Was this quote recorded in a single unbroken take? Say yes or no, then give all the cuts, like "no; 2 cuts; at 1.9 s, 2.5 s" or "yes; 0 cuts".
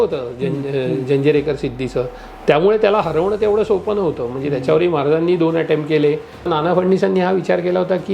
no; 1 cut; at 6.5 s